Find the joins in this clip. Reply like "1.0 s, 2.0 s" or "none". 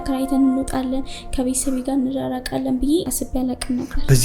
3.2 s